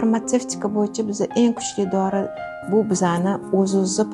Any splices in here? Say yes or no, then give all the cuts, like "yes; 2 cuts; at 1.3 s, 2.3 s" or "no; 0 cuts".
yes; 1 cut; at 2.4 s